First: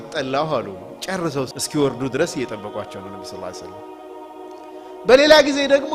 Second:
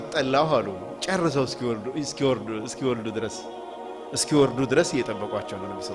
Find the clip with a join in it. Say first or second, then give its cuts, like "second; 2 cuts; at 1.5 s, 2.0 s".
first; 1 cut; at 1.5 s